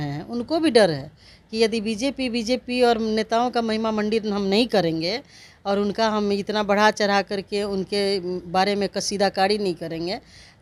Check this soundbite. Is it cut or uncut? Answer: uncut